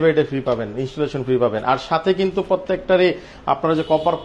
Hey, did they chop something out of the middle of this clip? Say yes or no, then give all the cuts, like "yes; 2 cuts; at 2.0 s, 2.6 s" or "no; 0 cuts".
no; 0 cuts